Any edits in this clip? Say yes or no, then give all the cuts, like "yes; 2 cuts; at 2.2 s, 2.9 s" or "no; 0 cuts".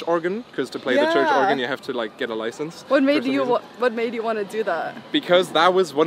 no; 0 cuts